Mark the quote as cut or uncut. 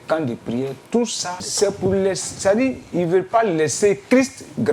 cut